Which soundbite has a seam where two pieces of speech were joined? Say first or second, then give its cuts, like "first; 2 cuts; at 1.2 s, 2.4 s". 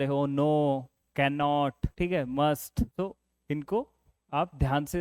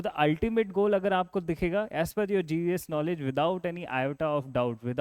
first; 2 cuts; at 1.8 s, 2.9 s